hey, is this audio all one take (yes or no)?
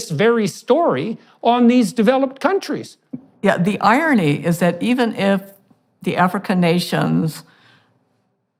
yes